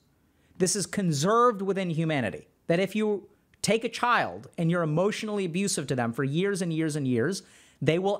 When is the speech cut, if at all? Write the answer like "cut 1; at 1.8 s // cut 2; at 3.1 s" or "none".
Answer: cut 1; at 2.5 s